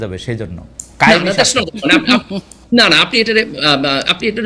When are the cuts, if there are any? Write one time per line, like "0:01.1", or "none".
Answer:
none